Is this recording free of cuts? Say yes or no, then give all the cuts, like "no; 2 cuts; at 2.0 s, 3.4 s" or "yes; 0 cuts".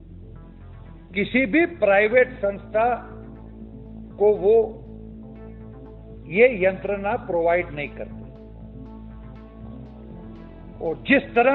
yes; 0 cuts